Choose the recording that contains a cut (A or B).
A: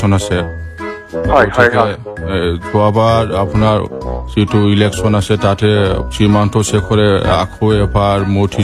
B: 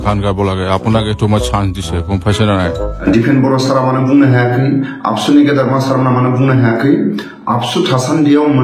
B